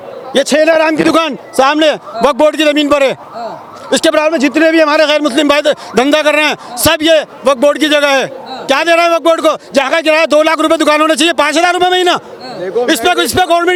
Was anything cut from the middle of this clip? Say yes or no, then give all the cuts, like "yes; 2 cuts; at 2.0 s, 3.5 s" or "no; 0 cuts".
no; 0 cuts